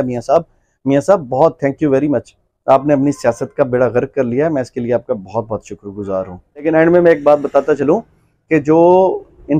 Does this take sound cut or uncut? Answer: cut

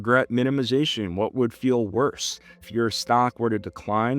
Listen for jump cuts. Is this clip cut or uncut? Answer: cut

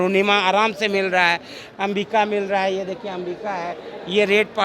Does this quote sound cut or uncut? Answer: uncut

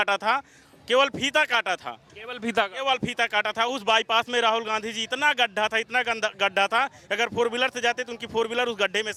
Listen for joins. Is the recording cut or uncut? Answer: uncut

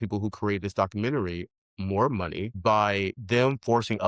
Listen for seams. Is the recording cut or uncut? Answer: cut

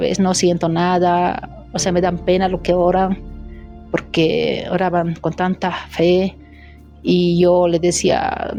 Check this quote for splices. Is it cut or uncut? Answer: uncut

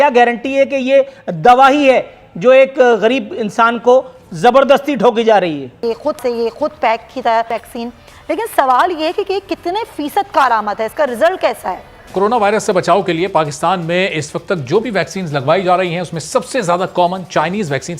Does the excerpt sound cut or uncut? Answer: cut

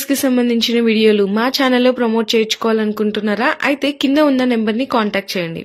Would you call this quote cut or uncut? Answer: uncut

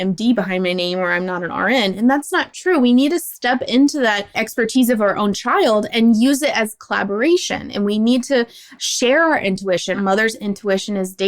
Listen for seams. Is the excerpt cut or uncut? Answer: cut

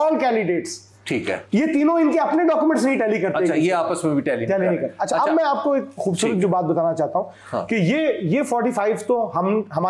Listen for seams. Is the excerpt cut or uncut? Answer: uncut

